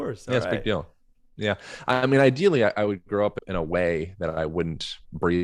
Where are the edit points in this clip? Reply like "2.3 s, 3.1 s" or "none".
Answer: 3.4 s